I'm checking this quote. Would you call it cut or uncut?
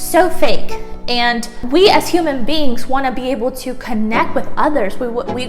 cut